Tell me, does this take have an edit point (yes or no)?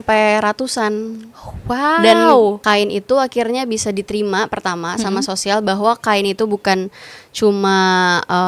yes